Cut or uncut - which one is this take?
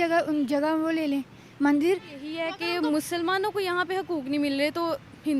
cut